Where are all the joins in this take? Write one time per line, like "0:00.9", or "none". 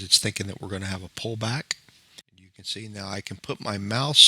0:02.2